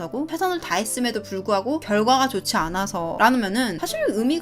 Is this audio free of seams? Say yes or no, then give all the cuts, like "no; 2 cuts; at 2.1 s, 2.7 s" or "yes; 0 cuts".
yes; 0 cuts